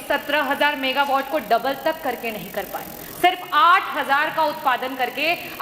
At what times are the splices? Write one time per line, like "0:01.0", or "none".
none